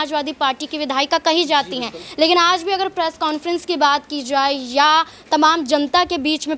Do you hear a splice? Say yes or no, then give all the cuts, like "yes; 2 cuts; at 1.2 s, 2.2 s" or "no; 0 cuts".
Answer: no; 0 cuts